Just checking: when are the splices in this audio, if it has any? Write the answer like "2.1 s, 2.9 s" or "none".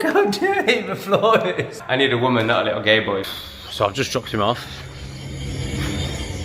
1.8 s, 3.3 s